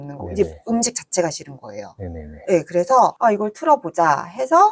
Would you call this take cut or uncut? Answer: uncut